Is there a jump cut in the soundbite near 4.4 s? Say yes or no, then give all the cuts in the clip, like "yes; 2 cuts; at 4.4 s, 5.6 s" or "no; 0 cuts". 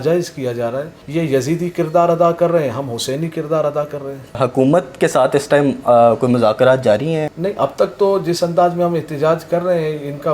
yes; 3 cuts; at 1.0 s, 4.4 s, 7.3 s